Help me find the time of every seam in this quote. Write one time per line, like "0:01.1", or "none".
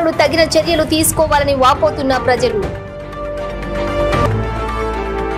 0:02.7